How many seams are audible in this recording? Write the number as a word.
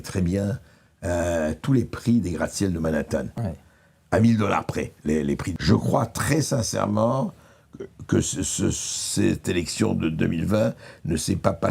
one